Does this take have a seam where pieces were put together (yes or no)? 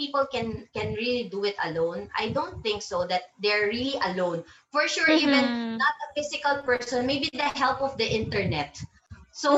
no